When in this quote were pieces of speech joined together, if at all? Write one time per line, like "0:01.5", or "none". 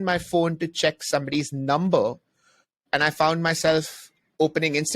0:02.8